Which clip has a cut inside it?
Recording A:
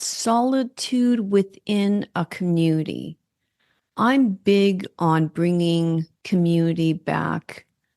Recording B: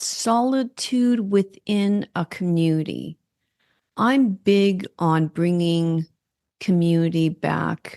A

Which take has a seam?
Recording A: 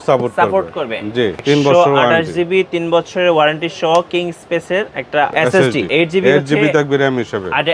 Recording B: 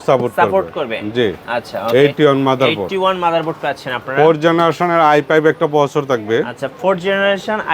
A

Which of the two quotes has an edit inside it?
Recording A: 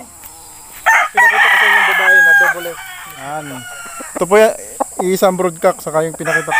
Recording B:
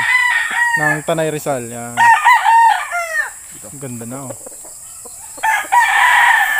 A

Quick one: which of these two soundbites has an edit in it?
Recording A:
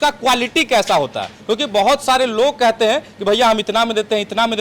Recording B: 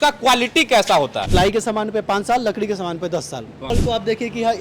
B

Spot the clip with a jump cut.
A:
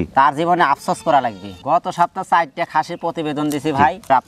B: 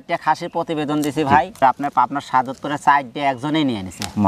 A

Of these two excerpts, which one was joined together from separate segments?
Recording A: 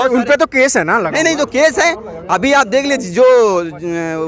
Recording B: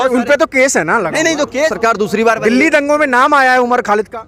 B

